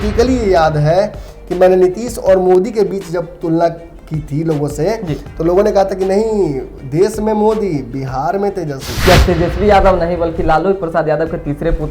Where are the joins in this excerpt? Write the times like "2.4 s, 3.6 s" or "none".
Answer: 8.9 s